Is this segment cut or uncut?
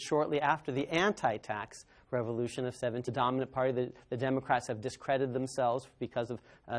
uncut